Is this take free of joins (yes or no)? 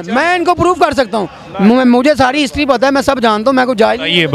yes